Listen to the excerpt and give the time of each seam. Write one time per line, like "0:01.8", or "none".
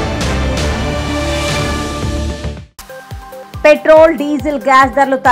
0:03.0